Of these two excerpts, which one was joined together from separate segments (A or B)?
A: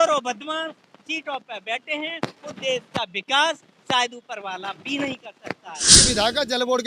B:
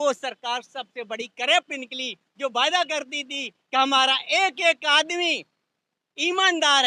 A